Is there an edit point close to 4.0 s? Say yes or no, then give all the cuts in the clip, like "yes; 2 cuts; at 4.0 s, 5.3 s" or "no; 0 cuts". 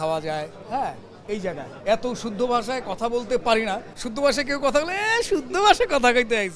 yes; 2 cuts; at 1.7 s, 4.0 s